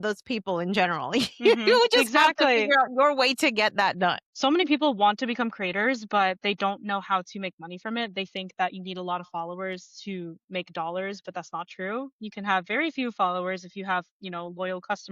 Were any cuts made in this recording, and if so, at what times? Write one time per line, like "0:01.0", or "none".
0:04.3